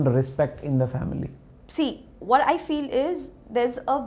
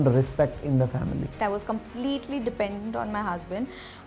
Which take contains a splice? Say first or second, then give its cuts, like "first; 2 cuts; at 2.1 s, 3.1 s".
second; 1 cut; at 1.3 s